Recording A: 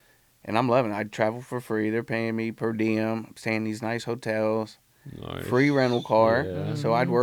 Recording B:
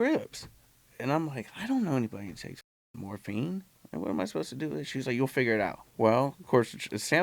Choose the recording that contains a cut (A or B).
B